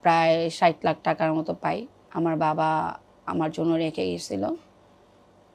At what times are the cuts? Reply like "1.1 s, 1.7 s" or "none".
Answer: none